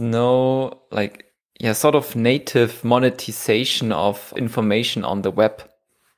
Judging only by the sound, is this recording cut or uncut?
uncut